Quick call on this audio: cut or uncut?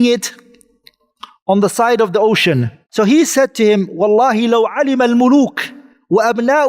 cut